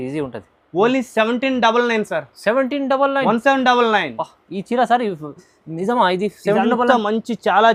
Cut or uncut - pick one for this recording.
uncut